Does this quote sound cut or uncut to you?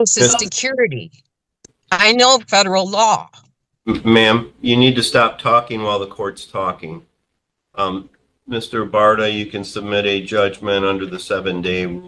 uncut